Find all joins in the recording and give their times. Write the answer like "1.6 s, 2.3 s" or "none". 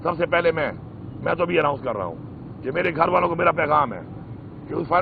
none